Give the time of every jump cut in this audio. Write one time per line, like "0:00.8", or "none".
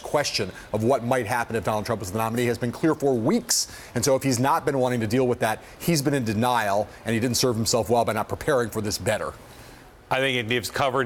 none